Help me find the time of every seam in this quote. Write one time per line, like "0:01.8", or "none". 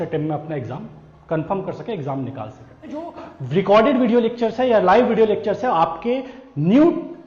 0:03.1